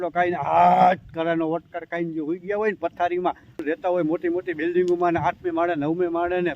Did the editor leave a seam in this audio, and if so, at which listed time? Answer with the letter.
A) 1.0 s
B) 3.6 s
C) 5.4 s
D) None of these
B